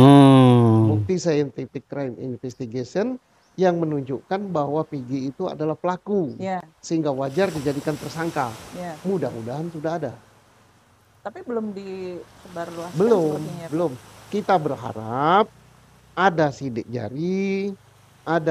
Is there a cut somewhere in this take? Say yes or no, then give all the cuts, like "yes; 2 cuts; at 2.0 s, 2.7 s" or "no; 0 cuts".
yes; 1 cut; at 1.0 s